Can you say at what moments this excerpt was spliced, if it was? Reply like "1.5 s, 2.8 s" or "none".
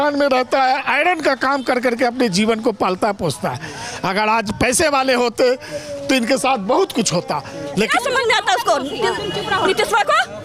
7.9 s